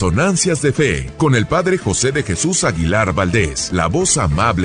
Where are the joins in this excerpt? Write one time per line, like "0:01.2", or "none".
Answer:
0:01.0
0:03.6